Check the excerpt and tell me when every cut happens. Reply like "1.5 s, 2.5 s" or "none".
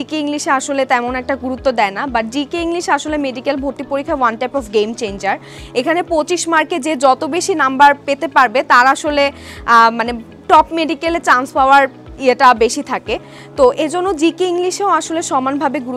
none